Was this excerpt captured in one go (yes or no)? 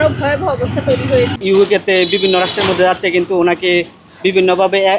no